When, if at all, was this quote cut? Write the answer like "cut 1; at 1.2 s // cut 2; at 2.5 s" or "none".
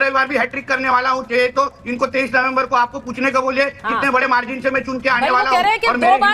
none